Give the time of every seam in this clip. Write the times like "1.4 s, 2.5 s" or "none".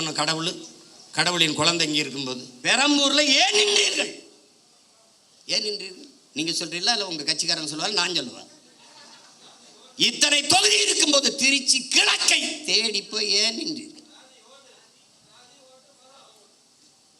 2.5 s